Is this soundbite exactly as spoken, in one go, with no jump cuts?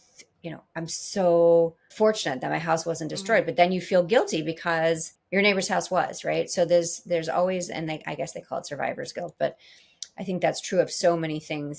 no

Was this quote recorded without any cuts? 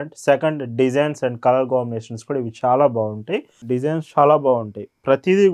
no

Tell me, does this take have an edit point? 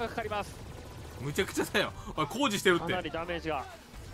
no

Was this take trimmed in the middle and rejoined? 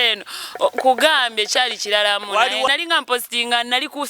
yes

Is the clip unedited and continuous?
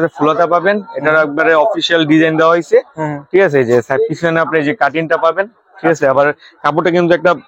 yes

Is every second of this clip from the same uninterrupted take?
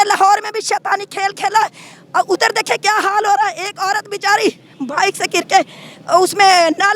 yes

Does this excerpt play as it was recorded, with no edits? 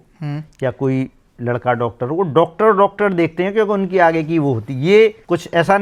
yes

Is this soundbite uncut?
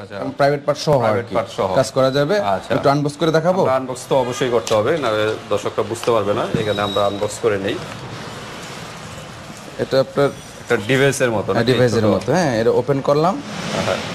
yes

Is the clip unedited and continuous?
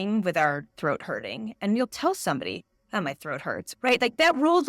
no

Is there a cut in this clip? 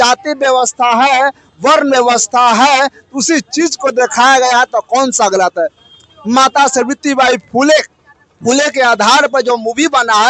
no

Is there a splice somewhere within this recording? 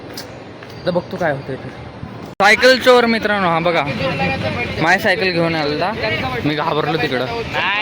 yes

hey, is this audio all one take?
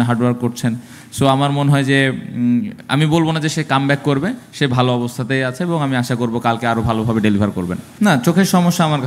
no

